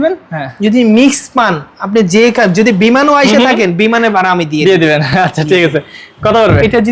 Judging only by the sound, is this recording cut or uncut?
uncut